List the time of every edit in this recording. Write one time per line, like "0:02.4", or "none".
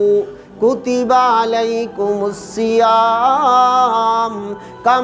none